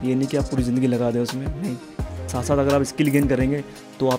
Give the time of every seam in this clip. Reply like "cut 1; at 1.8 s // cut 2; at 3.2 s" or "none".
none